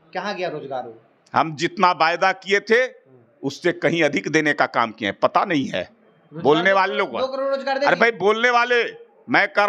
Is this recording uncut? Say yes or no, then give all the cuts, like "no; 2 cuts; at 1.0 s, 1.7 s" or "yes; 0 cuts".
yes; 0 cuts